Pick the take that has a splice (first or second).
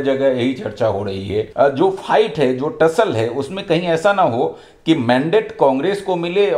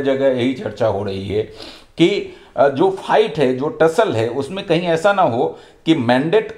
first